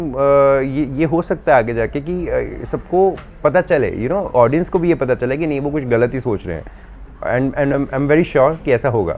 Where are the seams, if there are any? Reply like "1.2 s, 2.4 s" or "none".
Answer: none